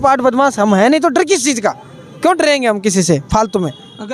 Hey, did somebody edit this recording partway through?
no; 0 cuts

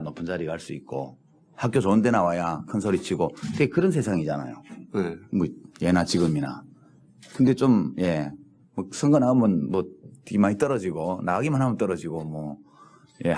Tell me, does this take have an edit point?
yes; 1 cut; at 3.7 s

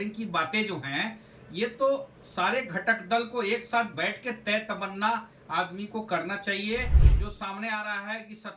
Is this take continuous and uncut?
no; 1 cut; at 7.0 s

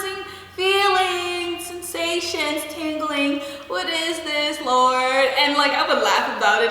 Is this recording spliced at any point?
no; 0 cuts

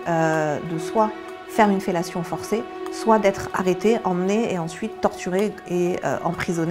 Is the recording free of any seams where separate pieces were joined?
yes; 0 cuts

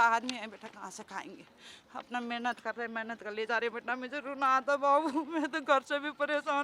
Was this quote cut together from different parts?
no; 0 cuts

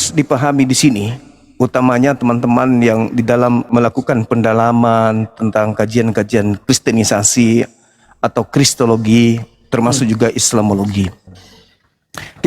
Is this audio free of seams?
no; 2 cuts; at 3.7 s, 6.6 s

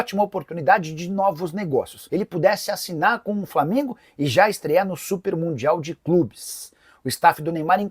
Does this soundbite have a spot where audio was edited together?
yes; 1 cut; at 2.0 s

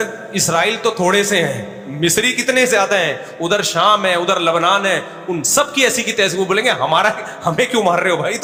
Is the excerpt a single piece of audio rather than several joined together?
yes; 0 cuts

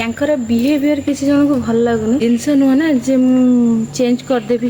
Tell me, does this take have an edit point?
yes; 1 cut; at 2.4 s

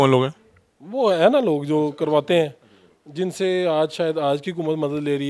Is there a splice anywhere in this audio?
no; 0 cuts

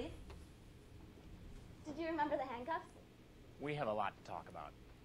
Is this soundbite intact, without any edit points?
yes; 0 cuts

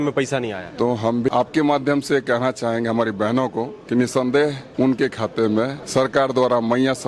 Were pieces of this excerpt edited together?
yes; 4 cuts; at 1.3 s, 3.8 s, 4.6 s, 5.8 s

